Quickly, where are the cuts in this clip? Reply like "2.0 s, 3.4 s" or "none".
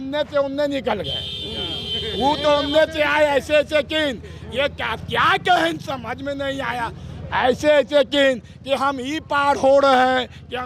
none